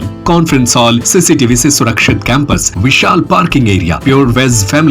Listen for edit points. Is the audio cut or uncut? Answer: cut